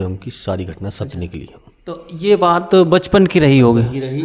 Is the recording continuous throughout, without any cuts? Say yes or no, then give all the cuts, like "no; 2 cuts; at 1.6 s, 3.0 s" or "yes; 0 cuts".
yes; 0 cuts